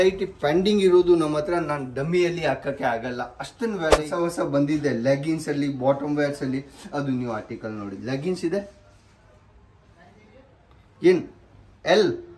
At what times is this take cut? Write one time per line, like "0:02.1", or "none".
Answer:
0:04.0